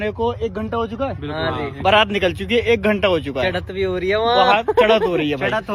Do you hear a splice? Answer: no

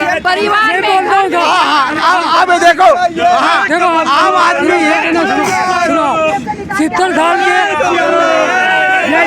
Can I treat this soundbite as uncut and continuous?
yes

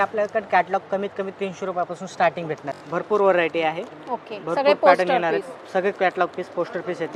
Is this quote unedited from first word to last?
yes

